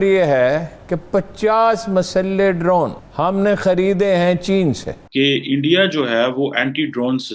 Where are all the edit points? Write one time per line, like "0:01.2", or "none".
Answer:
0:03.0
0:04.9